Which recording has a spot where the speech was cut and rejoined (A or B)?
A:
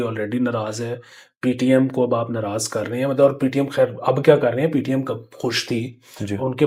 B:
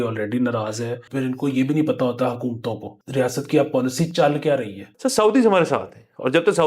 B